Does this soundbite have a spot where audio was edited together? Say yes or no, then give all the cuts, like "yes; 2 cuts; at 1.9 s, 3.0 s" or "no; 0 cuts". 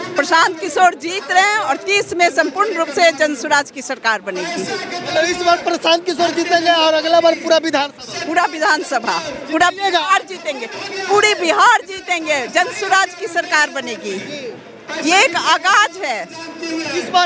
no; 0 cuts